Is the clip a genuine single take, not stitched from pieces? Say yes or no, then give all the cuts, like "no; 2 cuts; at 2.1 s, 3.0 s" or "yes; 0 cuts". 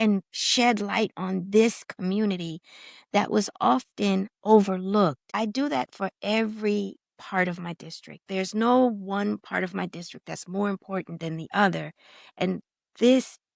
no; 1 cut; at 5.2 s